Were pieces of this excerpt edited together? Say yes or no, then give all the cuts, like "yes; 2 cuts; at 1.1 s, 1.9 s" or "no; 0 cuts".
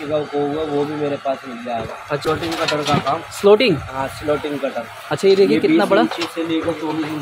yes; 1 cut; at 2.2 s